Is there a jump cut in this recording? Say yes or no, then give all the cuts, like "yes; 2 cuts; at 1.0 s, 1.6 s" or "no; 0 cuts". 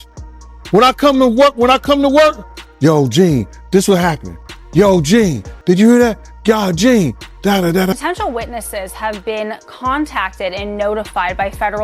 yes; 1 cut; at 7.9 s